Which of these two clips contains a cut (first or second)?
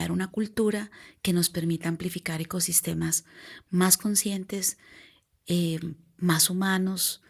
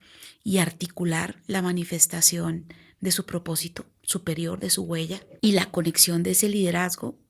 second